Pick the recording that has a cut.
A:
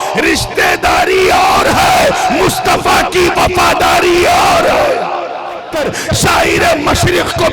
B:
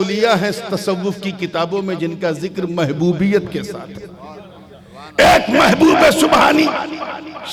A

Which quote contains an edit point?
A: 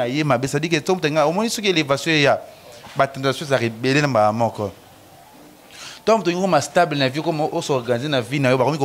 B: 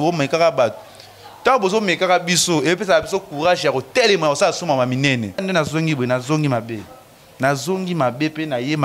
B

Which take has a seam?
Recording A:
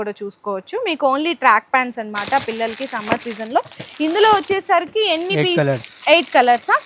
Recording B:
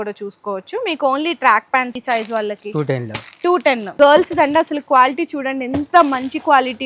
B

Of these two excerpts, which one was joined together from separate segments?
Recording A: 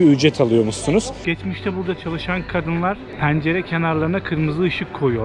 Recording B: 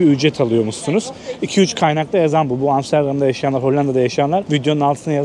A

